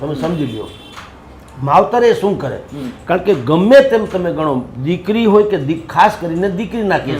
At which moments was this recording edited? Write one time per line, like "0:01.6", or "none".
none